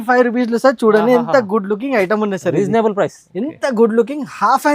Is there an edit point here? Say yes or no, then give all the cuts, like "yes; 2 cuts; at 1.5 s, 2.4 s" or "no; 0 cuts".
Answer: yes; 1 cut; at 3.2 s